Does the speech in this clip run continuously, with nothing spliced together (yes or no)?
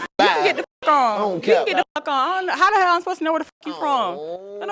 yes